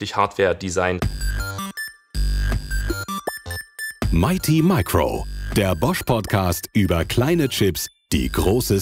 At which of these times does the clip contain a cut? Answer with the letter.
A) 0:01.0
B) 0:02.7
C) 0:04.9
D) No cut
A